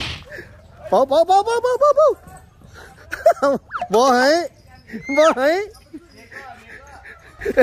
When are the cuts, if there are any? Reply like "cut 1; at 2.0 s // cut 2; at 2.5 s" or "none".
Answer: none